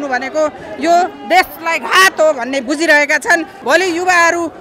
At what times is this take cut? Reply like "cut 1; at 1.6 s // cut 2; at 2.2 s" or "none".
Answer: cut 1; at 3.5 s